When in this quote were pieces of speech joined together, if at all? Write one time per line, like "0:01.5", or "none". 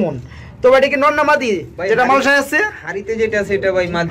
none

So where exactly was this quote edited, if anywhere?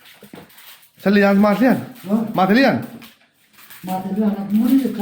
none

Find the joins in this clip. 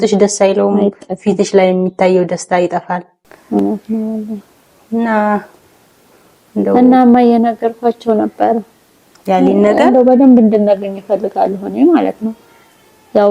none

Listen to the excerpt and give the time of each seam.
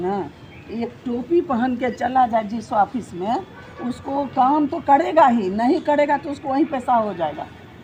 none

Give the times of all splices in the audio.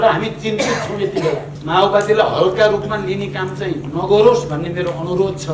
0:01.5

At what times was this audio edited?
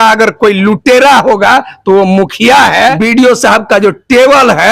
0:03.0

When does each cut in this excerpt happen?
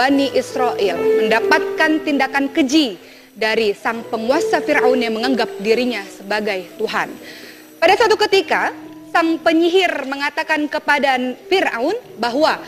0:11.2

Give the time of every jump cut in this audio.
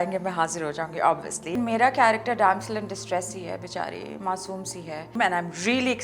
0:01.5
0:05.1

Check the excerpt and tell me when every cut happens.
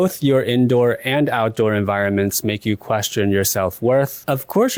none

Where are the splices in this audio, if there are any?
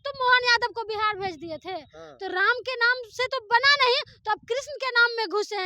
none

